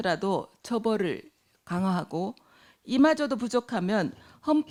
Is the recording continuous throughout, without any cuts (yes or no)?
yes